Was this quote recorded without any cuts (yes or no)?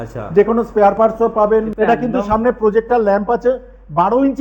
no